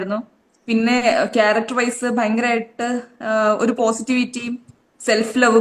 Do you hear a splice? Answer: no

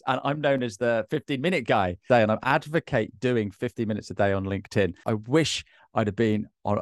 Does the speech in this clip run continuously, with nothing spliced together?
no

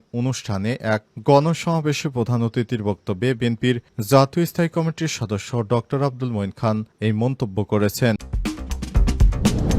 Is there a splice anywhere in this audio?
yes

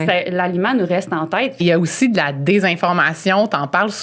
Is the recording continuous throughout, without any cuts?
no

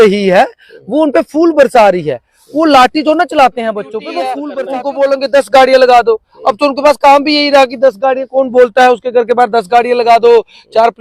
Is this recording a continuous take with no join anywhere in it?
no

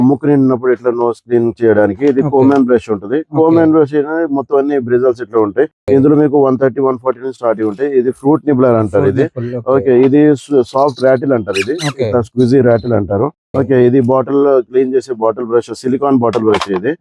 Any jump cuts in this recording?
no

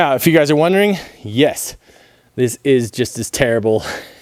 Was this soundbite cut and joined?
no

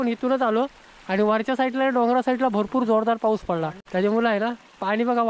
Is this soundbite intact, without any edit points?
no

